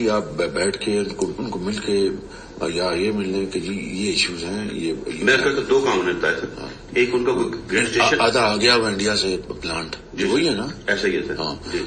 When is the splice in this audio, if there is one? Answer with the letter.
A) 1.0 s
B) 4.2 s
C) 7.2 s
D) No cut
D